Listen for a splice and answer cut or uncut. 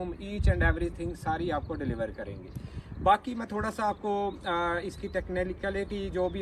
uncut